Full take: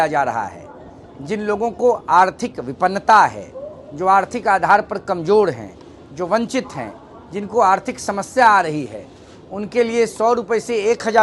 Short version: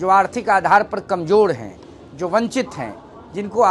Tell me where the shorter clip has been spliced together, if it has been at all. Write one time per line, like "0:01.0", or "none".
none